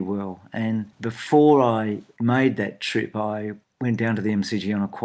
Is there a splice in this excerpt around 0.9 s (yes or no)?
yes